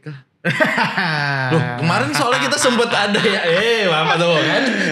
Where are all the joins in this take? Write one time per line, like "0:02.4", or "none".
none